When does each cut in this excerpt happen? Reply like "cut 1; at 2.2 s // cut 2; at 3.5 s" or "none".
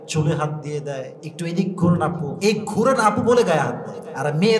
cut 1; at 1.2 s // cut 2; at 2.3 s

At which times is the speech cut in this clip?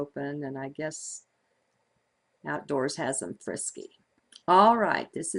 none

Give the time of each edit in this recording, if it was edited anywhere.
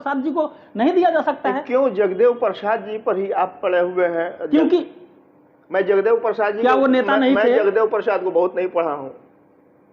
none

